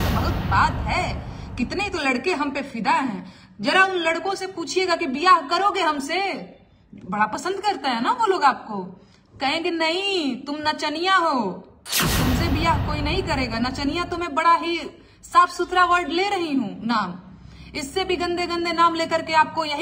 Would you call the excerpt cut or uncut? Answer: uncut